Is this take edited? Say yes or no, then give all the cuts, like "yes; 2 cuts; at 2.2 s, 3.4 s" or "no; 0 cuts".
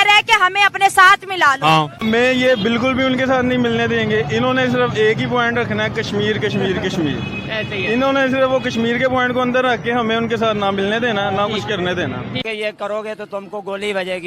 yes; 2 cuts; at 2.0 s, 12.4 s